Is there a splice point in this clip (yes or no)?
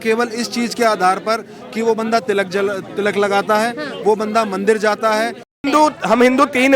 yes